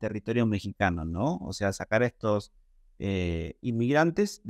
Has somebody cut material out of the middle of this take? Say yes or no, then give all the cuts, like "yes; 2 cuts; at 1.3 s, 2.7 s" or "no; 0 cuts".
no; 0 cuts